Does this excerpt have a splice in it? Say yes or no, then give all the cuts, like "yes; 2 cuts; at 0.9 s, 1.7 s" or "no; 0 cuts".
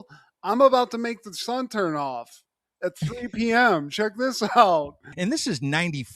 yes; 1 cut; at 5.1 s